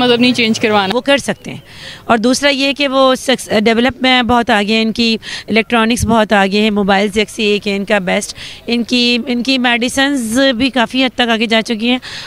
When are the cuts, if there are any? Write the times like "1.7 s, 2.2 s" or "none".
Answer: 0.9 s

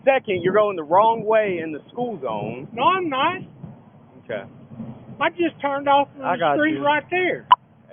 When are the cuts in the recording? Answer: none

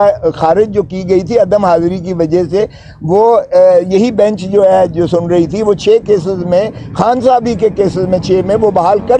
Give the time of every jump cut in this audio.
none

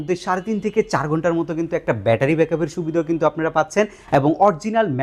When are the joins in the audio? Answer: none

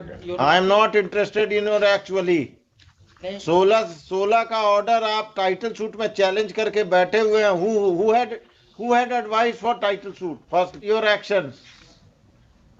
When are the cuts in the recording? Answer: 10.8 s

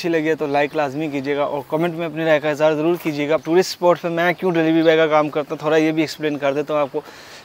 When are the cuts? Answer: 3.4 s

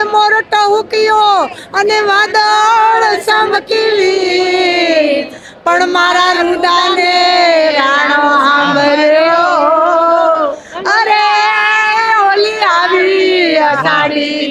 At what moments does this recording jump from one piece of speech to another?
none

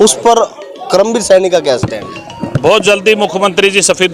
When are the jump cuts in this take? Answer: none

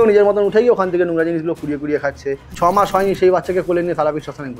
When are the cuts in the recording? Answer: 2.4 s

